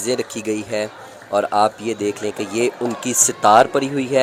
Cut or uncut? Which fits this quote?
uncut